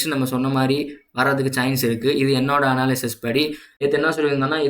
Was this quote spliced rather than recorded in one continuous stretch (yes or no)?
yes